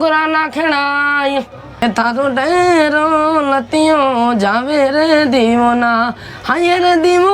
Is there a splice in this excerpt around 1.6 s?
yes; 1 cut; at 1.6 s

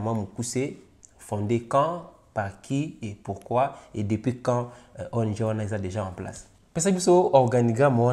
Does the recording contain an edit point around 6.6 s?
yes; 1 cut; at 6.6 s

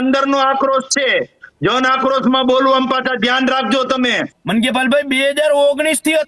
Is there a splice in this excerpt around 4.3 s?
yes; 1 cut; at 4.3 s

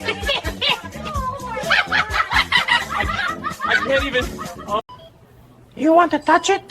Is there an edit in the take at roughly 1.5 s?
no; 1 cut; at 4.9 s

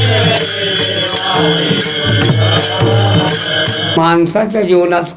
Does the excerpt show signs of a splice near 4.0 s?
yes; 1 cut; at 4.0 s

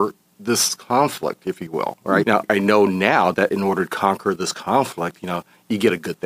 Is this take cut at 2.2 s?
yes; 1 cut; at 2.2 s

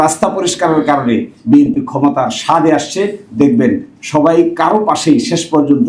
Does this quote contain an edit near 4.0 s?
no; 0 cuts

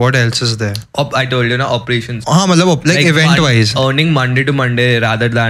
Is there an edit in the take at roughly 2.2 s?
yes; 1 cut; at 2.2 s

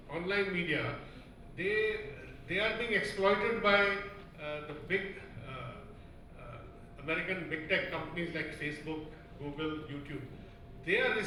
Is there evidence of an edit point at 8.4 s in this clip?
no; 0 cuts

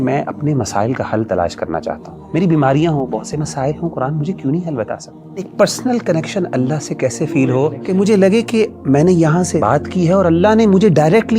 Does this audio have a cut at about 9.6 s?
yes; 4 cuts; at 2.1 s, 5.5 s, 7.8 s, 9.6 s

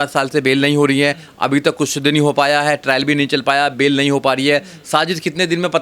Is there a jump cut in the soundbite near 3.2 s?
no; 0 cuts

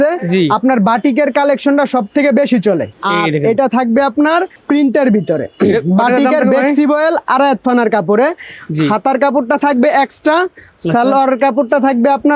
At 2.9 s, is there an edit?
no; 0 cuts

